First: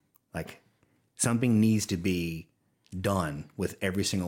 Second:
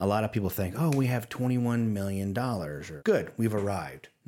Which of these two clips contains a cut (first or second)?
second